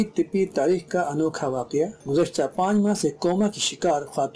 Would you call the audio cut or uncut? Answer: uncut